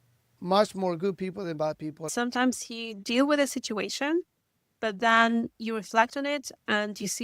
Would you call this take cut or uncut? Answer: cut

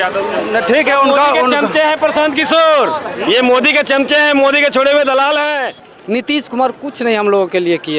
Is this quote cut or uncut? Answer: cut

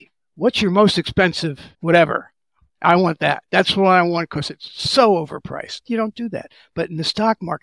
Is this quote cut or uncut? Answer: cut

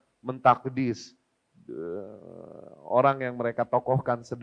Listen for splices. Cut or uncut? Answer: uncut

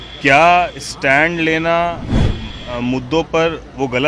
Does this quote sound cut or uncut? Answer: uncut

